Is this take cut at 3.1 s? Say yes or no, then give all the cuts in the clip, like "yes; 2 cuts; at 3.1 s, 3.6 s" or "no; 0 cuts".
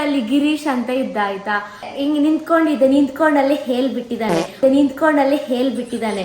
no; 1 cut; at 1.9 s